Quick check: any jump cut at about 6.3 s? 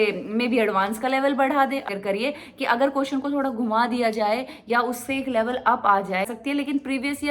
yes; 2 cuts; at 1.8 s, 6.3 s

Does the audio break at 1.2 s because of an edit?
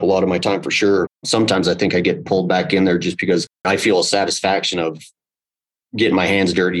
yes; 2 cuts; at 1.2 s, 3.7 s

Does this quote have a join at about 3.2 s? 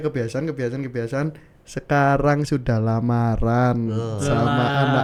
no; 0 cuts

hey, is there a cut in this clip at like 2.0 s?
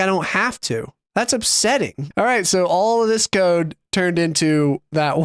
yes; 1 cut; at 2.0 s

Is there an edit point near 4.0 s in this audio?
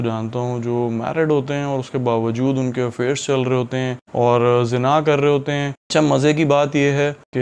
no; 1 cut; at 5.8 s

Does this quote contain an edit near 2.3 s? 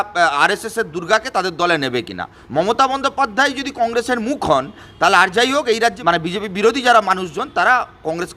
yes; 2 cuts; at 2.3 s, 6.0 s

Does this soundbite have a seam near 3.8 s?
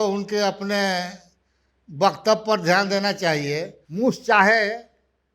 yes; 1 cut; at 3.8 s

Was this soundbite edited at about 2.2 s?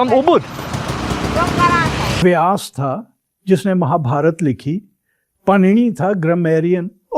yes; 1 cut; at 2.2 s

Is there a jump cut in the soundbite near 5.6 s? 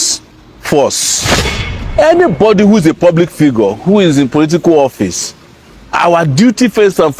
no; 1 cut; at 1.6 s

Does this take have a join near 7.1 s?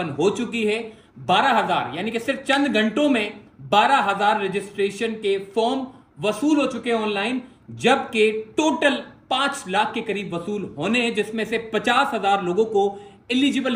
no; 0 cuts

